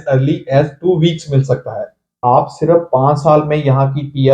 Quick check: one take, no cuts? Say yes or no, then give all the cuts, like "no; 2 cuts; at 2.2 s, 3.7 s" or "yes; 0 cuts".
no; 1 cut; at 2.2 s